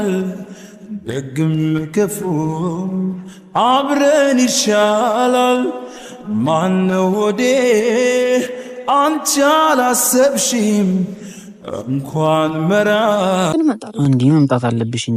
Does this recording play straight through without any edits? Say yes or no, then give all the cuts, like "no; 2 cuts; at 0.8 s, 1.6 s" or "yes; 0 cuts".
yes; 0 cuts